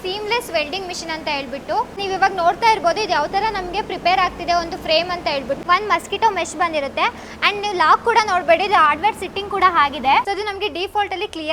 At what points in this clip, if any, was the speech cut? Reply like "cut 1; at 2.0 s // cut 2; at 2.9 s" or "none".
cut 1; at 2.0 s // cut 2; at 5.6 s // cut 3; at 10.2 s